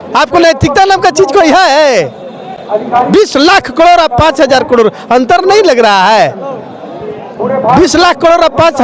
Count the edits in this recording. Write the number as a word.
zero